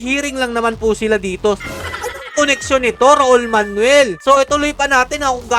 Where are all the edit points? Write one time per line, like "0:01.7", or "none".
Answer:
0:01.6
0:04.2